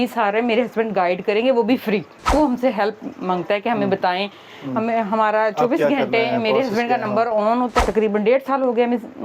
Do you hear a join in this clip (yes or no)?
yes